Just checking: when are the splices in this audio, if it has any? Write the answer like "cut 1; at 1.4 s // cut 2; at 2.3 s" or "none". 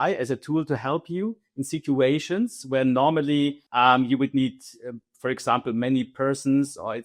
none